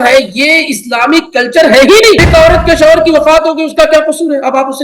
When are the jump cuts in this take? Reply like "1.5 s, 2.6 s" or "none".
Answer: 2.2 s